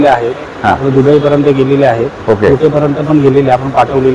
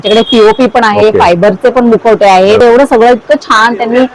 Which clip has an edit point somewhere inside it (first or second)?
second